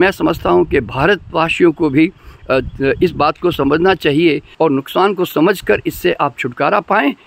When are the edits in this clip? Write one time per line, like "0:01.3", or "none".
0:04.5